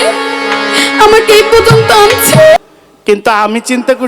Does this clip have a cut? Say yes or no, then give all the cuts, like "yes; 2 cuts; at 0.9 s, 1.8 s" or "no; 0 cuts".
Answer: yes; 1 cut; at 2.6 s